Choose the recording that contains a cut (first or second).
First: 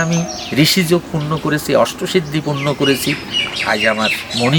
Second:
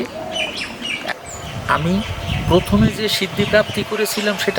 second